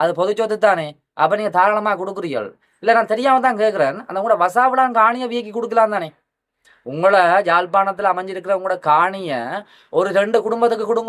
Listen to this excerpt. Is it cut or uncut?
uncut